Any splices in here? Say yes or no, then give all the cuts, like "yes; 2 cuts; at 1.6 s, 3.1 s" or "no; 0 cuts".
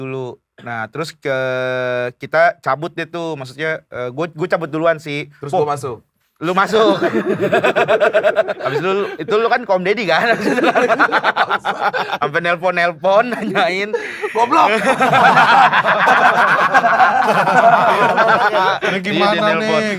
yes; 4 cuts; at 8.5 s, 12.1 s, 17.9 s, 18.9 s